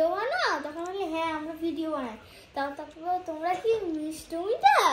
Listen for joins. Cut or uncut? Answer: uncut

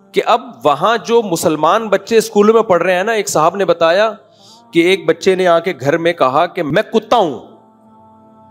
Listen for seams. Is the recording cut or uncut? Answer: cut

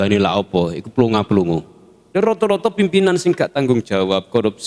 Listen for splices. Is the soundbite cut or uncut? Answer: cut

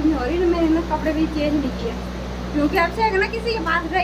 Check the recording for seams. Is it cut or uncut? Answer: uncut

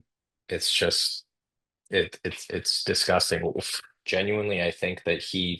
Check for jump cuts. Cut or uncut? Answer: cut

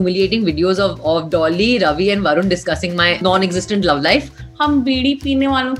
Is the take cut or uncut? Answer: cut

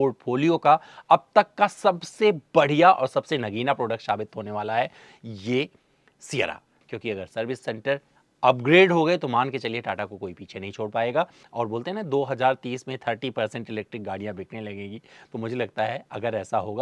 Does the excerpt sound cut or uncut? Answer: cut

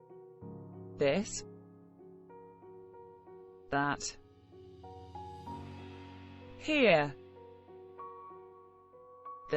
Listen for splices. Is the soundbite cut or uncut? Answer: cut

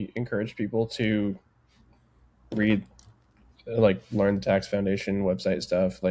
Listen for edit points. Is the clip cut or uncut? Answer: uncut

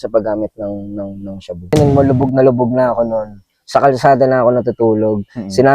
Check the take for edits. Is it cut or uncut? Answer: cut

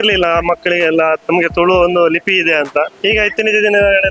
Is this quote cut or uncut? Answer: cut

